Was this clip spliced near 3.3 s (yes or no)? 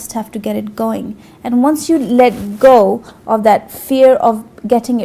no